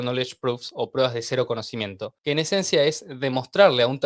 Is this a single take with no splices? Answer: yes; 0 cuts

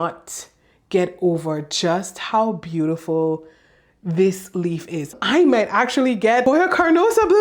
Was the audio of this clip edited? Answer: yes; 1 cut; at 5.2 s

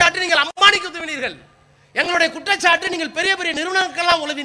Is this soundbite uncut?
yes; 0 cuts

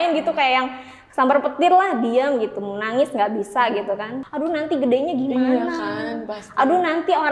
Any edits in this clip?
yes; 1 cut; at 4.2 s

